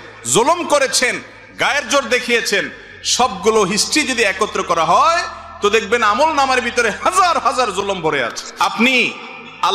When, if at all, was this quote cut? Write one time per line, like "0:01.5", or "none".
0:08.4